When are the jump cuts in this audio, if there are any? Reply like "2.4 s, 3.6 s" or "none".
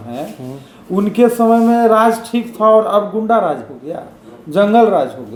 none